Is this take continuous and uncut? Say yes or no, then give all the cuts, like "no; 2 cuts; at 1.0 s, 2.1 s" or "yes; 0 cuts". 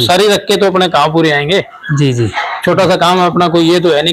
yes; 0 cuts